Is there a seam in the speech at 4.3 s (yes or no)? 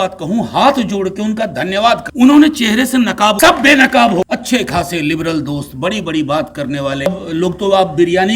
yes